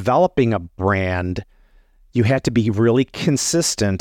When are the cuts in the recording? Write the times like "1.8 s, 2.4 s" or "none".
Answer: none

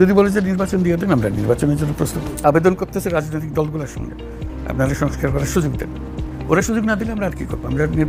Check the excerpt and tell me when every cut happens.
none

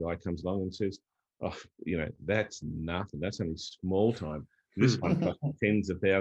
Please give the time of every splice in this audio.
none

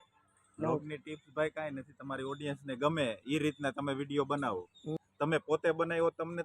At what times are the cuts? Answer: 5.0 s

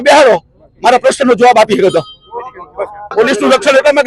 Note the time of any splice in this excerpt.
3.1 s

